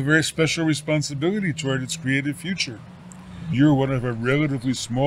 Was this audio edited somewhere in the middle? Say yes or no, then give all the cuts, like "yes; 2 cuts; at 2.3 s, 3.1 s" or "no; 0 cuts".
yes; 1 cut; at 3.5 s